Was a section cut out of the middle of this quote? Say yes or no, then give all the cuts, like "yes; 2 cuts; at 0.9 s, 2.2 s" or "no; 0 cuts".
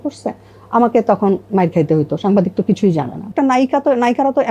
yes; 1 cut; at 3.3 s